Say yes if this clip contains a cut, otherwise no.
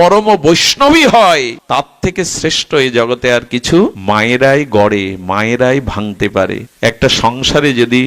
yes